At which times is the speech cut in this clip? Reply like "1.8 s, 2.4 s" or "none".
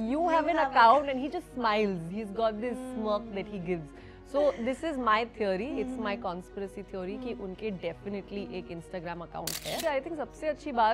9.8 s